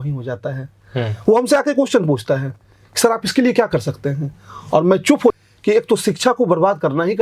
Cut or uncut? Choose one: cut